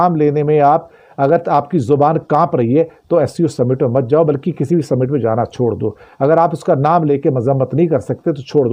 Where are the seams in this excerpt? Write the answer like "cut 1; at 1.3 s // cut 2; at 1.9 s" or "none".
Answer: none